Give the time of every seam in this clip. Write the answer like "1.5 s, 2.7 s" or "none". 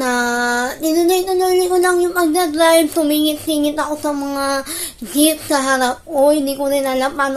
none